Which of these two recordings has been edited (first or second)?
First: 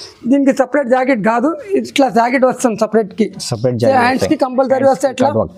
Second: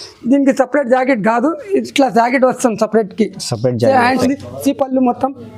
second